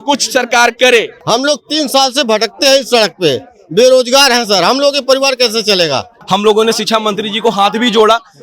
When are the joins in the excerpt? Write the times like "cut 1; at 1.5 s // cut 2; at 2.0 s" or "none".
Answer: cut 1; at 1.2 s // cut 2; at 6.1 s